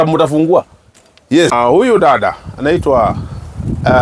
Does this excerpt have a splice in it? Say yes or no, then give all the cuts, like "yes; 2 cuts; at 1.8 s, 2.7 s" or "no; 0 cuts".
yes; 1 cut; at 1.5 s